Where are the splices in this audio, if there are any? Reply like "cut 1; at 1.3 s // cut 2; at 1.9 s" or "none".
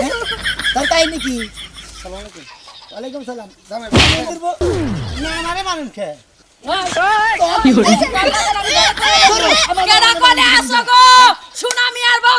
cut 1; at 6.4 s